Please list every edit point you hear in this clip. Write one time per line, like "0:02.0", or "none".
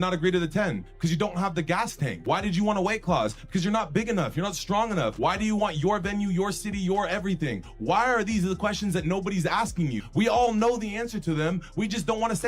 0:02.1
0:05.1
0:10.0